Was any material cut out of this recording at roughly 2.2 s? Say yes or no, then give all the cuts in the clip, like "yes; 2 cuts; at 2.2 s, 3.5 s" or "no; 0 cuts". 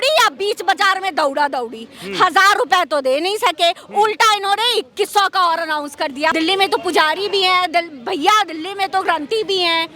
no; 1 cut; at 6.3 s